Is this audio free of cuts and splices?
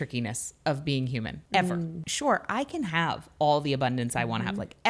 no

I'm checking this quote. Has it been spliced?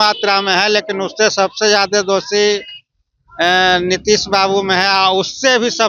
no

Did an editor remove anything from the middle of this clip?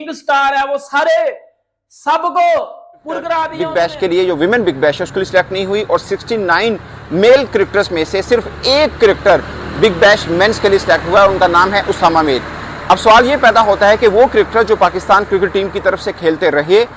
yes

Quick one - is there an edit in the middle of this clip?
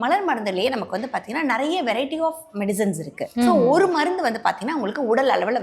yes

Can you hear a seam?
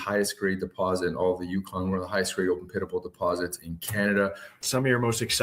yes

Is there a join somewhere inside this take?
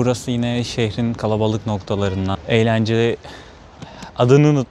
yes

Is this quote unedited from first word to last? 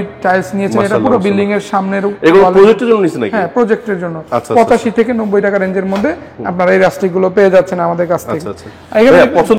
yes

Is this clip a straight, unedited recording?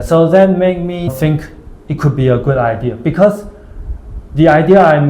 no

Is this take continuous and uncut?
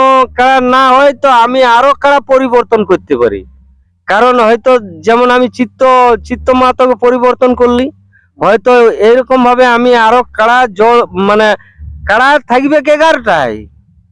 yes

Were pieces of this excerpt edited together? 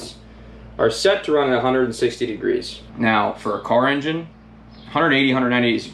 yes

